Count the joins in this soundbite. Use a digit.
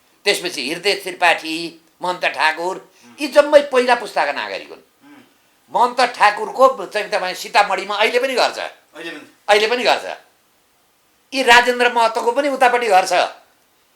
0